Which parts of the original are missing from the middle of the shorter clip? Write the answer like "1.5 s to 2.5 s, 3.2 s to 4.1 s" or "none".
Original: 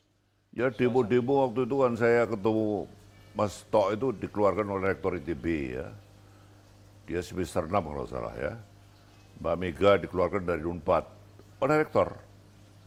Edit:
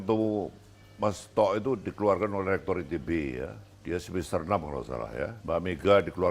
6.0 s to 6.9 s, 8.6 s to 9.3 s